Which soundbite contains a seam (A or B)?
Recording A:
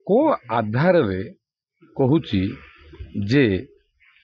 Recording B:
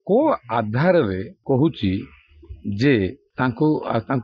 B